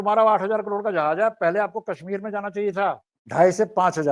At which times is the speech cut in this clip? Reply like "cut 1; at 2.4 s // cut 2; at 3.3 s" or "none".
cut 1; at 3.1 s